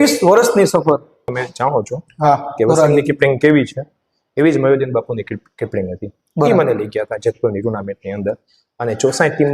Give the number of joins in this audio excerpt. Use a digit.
1